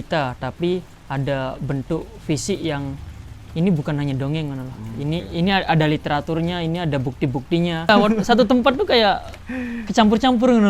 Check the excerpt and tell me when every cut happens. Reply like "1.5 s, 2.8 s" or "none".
7.9 s